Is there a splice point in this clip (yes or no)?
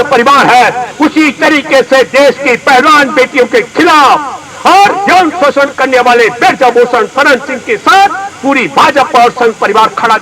no